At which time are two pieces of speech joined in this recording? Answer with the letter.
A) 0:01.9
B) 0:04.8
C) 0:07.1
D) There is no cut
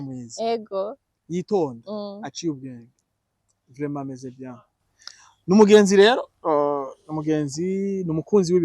D